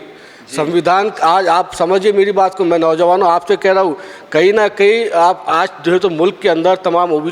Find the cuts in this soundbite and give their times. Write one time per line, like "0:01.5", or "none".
none